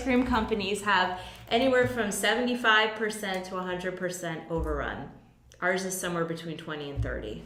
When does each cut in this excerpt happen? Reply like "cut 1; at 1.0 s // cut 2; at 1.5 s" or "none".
none